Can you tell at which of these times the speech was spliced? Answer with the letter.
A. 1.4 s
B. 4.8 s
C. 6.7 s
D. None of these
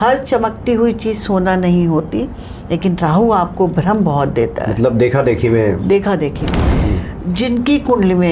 C